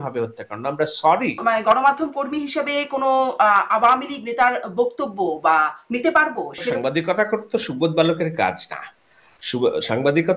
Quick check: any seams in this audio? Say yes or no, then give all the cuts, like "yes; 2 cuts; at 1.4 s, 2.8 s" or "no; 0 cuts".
yes; 2 cuts; at 1.4 s, 6.8 s